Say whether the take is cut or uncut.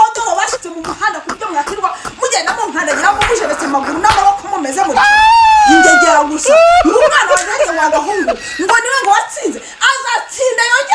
uncut